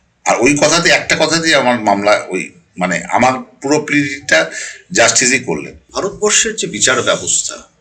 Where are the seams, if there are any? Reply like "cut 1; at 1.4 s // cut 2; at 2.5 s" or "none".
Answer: cut 1; at 5.8 s

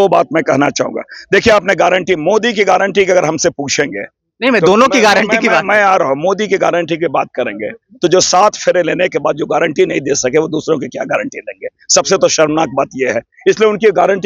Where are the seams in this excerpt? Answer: none

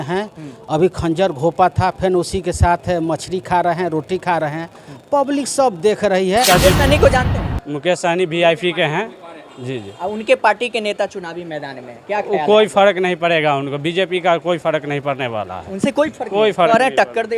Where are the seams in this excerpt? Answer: cut 1; at 6.5 s

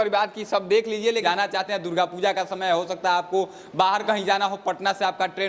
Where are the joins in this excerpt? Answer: cut 1; at 1.2 s

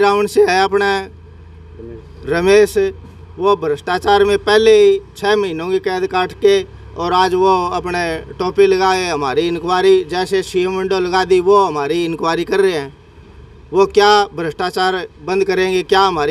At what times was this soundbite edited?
none

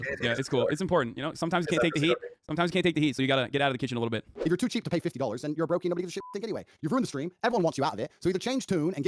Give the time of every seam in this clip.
cut 1; at 4.3 s

